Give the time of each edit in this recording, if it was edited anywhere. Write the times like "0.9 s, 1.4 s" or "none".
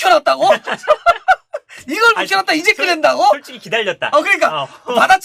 none